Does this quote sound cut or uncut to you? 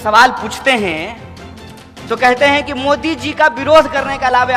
uncut